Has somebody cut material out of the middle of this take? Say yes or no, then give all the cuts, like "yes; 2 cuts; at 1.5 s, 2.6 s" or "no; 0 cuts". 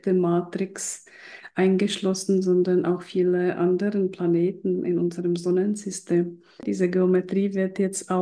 yes; 1 cut; at 6.6 s